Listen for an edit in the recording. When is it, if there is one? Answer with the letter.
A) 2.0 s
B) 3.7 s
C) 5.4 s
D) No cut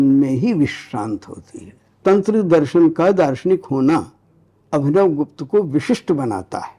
A